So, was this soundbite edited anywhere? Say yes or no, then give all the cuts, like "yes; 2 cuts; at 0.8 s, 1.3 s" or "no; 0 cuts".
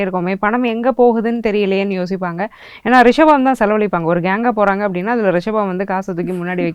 no; 0 cuts